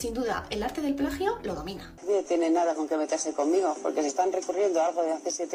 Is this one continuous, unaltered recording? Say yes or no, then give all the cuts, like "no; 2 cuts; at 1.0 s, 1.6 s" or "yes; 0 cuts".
no; 1 cut; at 2.0 s